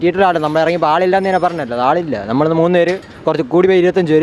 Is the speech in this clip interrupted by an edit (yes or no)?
no